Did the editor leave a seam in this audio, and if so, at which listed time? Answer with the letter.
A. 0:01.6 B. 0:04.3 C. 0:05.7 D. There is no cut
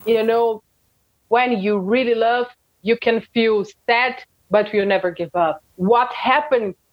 C